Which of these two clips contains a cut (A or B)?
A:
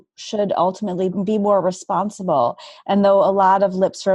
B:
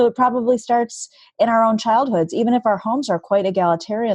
A